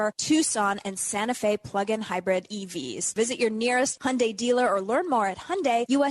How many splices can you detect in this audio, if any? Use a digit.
1